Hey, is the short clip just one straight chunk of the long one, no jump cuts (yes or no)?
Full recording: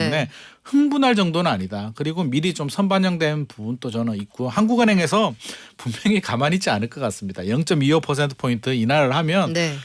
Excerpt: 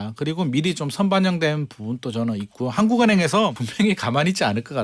no